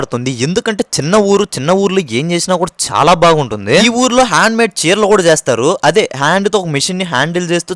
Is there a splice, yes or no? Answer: no